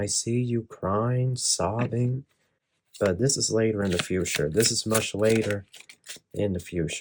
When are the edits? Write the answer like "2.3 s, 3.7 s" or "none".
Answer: none